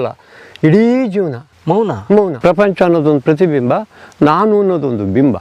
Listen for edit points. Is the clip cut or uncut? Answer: cut